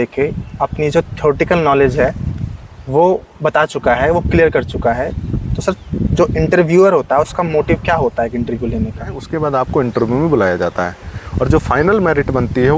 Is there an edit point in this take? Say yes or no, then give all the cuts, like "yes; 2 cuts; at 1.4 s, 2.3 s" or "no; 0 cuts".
yes; 1 cut; at 9.3 s